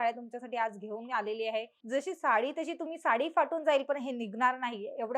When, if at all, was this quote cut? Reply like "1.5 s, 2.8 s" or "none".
1.8 s